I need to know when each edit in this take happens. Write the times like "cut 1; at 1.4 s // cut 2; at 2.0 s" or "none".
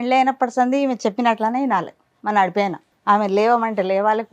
cut 1; at 2.9 s